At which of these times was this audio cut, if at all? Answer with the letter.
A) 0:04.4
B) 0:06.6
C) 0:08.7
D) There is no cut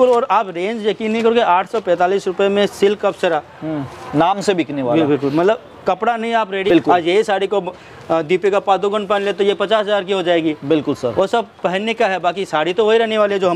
B